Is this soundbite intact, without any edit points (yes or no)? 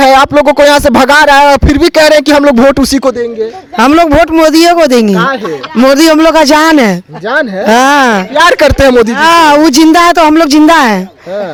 yes